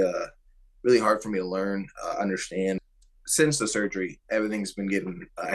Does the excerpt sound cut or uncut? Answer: cut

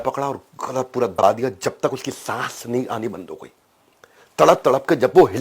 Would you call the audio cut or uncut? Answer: cut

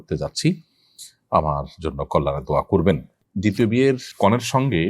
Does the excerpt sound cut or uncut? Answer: cut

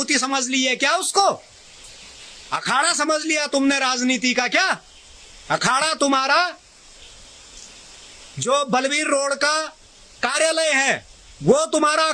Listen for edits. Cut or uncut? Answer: uncut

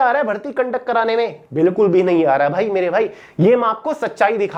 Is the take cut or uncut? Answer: uncut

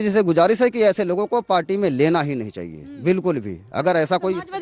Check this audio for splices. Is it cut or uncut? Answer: uncut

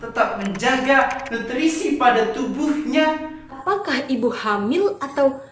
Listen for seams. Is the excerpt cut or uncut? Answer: cut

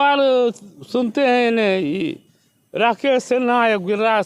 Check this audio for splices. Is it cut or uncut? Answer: uncut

